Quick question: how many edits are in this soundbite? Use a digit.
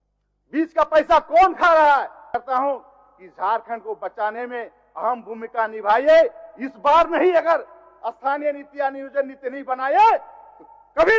1